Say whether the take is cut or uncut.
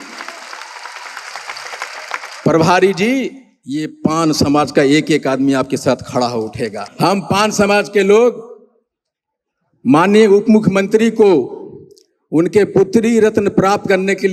cut